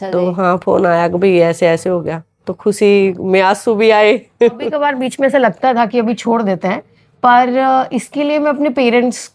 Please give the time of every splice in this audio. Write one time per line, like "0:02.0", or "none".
0:04.8